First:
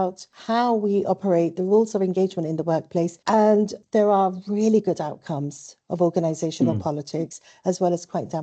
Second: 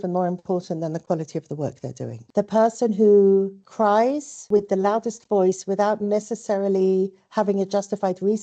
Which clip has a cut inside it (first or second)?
second